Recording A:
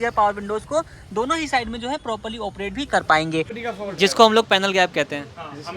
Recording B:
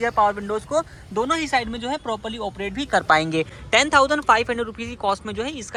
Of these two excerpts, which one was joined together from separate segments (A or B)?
A